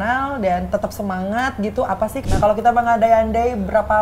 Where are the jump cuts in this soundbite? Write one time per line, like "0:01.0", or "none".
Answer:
0:02.2